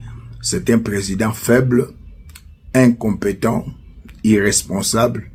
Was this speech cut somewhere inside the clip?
no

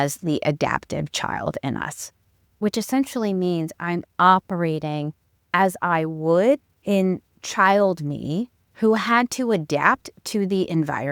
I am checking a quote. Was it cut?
yes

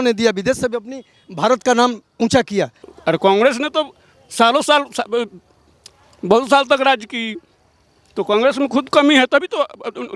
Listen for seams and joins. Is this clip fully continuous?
no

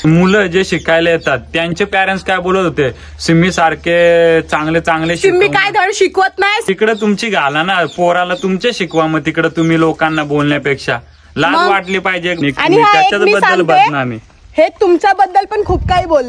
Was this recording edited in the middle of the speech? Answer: yes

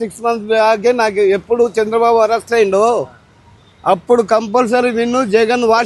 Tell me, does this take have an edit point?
no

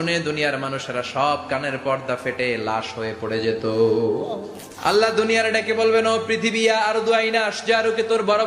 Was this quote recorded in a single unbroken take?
yes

